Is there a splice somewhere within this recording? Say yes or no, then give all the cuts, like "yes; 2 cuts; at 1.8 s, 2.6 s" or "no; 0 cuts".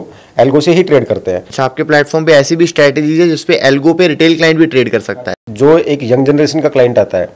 yes; 2 cuts; at 1.4 s, 5.1 s